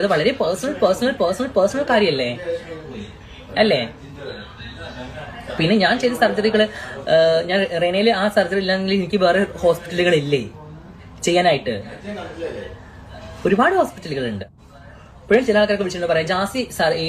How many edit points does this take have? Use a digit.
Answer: 0